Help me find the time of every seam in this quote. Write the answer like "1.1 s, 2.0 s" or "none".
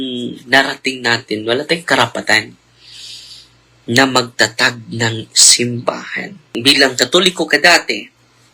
6.4 s